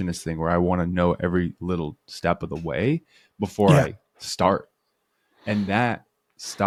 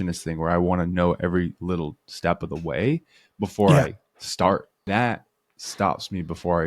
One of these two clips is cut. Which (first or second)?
second